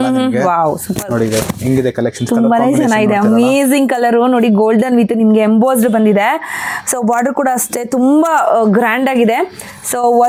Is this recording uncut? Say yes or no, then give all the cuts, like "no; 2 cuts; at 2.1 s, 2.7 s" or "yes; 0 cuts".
yes; 0 cuts